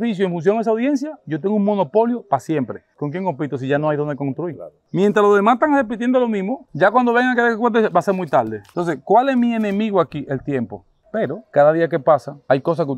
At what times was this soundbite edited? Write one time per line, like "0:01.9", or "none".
0:04.8
0:10.9